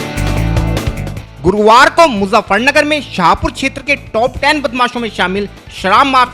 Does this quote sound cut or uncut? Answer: uncut